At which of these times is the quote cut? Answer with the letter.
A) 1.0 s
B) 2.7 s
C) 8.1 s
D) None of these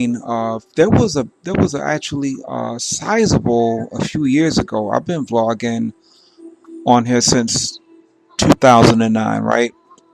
D